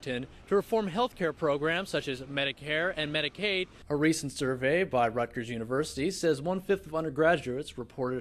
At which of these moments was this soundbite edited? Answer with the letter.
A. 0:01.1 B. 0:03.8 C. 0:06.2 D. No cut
B